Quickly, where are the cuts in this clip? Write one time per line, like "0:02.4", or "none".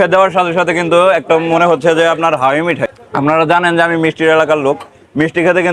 0:02.9